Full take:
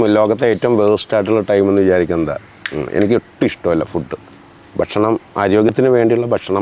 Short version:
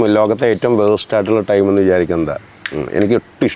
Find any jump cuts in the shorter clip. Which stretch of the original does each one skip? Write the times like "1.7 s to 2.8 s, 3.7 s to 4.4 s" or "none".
none